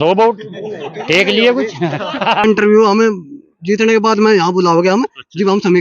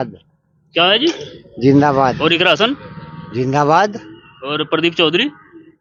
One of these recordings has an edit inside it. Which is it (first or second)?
first